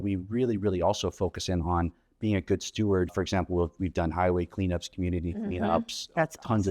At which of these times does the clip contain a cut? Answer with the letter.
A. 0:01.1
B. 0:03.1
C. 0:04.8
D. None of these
B